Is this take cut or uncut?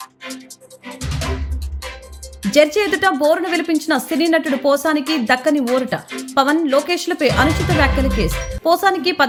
uncut